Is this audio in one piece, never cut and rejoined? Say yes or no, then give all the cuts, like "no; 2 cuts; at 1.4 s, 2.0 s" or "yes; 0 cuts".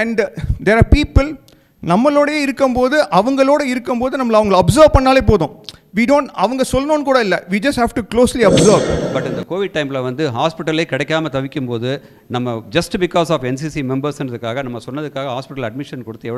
no; 1 cut; at 9.0 s